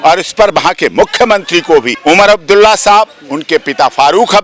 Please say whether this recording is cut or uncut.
cut